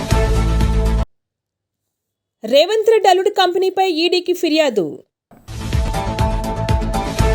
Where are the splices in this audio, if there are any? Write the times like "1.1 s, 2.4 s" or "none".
none